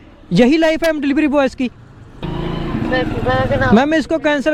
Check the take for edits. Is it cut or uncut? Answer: uncut